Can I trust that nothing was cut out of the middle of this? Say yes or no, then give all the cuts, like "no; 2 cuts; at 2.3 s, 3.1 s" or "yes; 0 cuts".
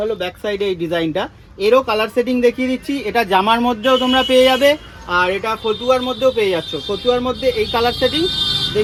yes; 0 cuts